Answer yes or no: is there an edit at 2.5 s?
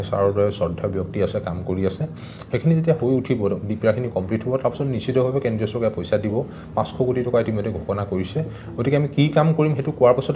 no